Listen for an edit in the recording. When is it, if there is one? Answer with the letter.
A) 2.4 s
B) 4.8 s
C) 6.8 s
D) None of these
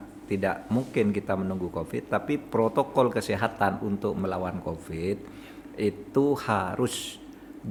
D